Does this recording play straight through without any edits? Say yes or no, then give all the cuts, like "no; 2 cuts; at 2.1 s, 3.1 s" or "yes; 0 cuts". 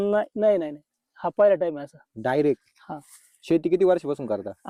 yes; 0 cuts